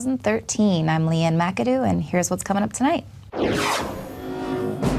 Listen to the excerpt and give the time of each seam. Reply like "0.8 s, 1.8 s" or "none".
2.8 s